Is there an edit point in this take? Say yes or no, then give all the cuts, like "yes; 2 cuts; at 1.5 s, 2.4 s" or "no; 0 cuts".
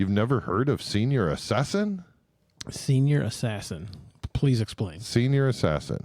no; 0 cuts